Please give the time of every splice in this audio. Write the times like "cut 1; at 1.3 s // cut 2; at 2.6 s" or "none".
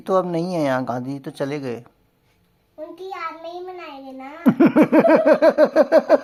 none